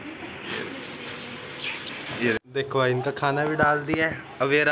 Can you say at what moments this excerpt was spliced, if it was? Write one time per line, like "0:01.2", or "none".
0:02.4